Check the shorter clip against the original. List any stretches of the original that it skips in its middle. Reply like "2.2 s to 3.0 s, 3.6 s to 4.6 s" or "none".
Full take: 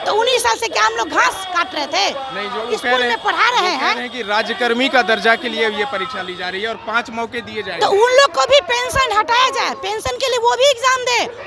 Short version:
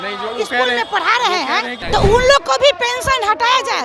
4.1 s to 7.7 s